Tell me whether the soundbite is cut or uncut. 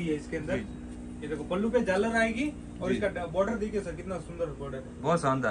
uncut